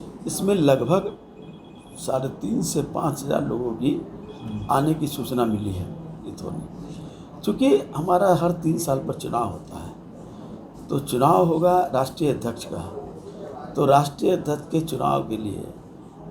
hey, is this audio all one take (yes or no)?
no